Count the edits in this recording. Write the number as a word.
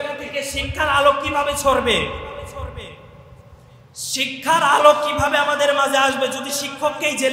zero